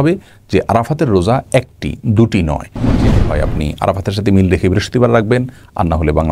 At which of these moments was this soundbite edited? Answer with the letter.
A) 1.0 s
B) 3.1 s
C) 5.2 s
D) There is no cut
B